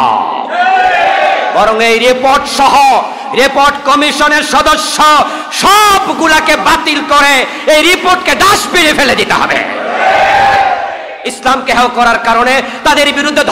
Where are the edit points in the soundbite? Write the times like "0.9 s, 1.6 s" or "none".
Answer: 11.3 s